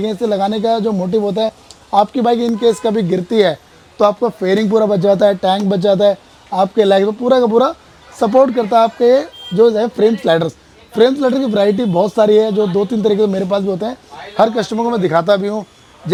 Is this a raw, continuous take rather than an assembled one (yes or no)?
yes